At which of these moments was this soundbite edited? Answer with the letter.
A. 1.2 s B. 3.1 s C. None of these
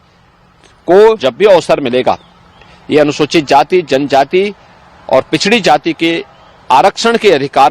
A